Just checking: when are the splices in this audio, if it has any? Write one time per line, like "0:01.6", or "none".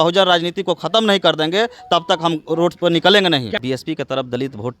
0:03.6

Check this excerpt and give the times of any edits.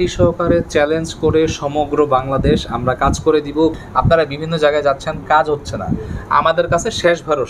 0:03.8

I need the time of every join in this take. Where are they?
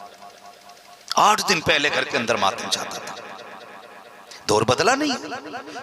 0:00.9

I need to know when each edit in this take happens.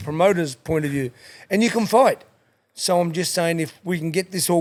none

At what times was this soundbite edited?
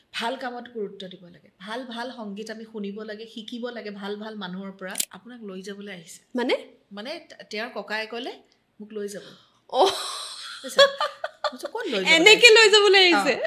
0:05.0

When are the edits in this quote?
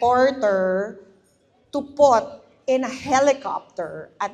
none

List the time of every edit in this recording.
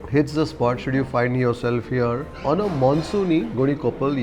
none

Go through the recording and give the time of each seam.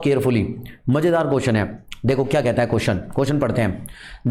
none

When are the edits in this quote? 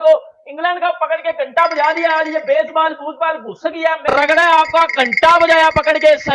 0:04.0

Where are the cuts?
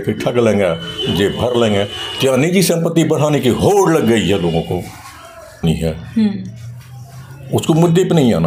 0:05.6

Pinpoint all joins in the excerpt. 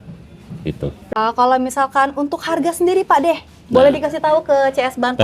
0:01.0

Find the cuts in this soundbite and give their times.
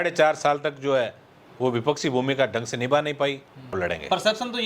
0:03.8

